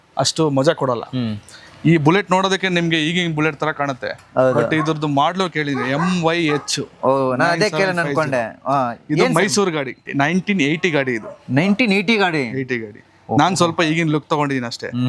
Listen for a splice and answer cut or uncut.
uncut